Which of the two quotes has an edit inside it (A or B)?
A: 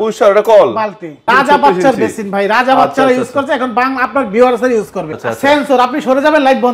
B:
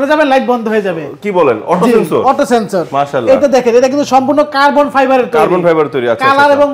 A